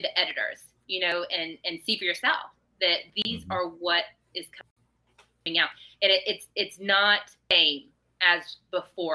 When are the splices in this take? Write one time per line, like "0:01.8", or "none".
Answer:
none